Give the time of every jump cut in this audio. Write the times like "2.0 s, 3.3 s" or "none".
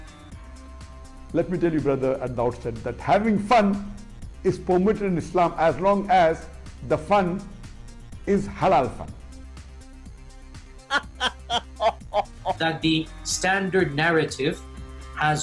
12.0 s